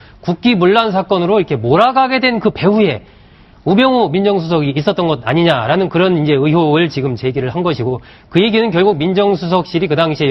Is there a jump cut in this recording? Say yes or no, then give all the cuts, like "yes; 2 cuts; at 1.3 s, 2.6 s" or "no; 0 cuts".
yes; 1 cut; at 4.4 s